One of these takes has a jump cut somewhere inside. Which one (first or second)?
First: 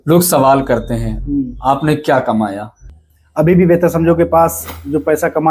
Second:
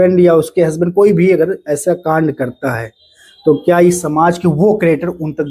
first